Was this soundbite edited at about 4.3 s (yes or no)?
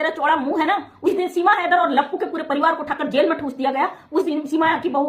yes